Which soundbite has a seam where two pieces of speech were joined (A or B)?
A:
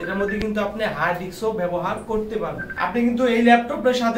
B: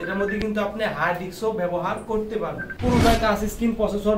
B